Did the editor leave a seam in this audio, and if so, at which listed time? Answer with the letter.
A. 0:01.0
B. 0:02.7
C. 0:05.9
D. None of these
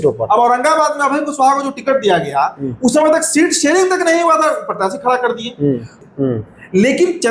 C